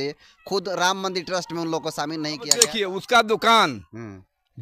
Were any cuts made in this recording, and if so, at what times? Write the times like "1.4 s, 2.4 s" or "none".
2.7 s